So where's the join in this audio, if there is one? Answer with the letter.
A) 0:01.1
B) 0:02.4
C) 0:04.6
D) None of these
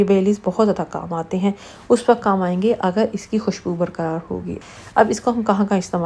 C